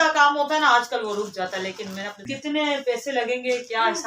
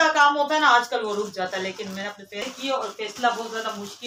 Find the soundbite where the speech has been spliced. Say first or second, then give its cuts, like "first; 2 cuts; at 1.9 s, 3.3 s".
first; 1 cut; at 2.3 s